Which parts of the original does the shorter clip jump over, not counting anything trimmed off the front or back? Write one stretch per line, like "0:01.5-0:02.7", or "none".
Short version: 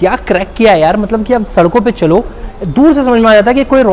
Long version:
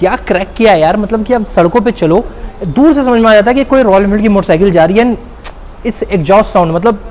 none

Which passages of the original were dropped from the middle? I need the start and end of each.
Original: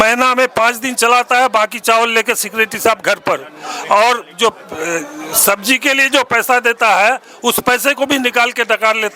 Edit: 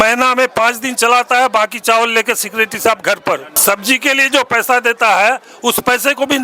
0:03.5-0:05.3

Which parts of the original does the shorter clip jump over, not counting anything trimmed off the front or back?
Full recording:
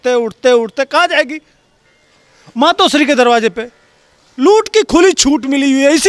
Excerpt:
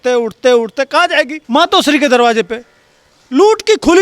0:01.4-0:02.4

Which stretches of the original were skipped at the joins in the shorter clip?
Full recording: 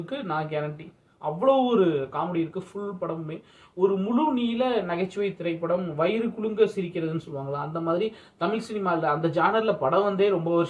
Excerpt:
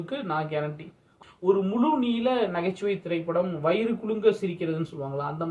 0:01.0-0:03.4

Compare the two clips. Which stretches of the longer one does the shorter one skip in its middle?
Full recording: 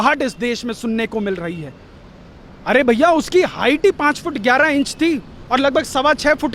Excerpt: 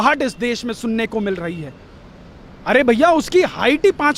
none

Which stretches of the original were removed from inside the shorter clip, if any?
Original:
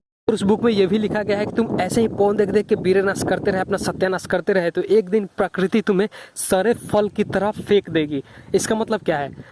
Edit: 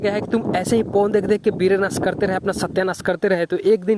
none

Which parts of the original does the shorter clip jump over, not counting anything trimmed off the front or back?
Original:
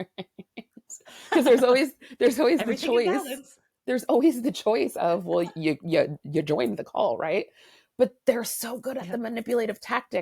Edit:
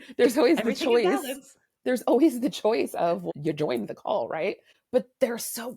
0:05.3-0:06.1
0:07.6-0:07.8

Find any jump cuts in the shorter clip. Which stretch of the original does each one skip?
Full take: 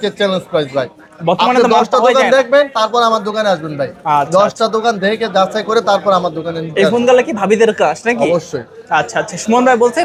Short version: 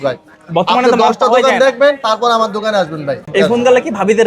0:03.9-0:06.6

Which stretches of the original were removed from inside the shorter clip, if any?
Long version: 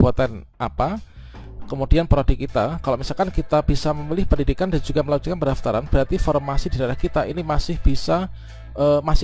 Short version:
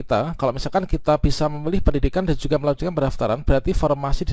none

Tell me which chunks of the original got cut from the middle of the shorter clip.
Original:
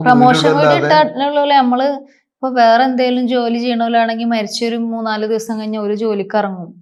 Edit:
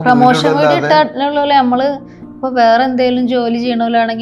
none

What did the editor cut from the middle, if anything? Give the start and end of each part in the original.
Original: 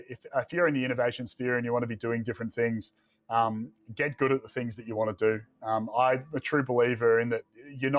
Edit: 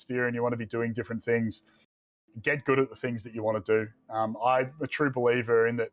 0:03.3-0:03.5

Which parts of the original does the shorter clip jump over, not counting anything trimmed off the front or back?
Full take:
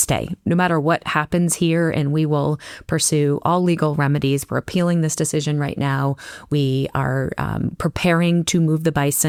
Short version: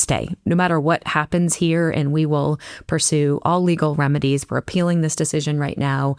none

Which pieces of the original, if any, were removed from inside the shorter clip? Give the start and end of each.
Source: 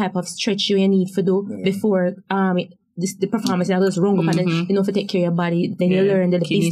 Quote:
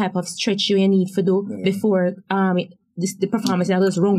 none

